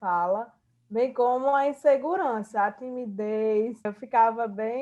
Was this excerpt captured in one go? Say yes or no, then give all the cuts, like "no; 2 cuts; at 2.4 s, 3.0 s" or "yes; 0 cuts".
no; 1 cut; at 3.9 s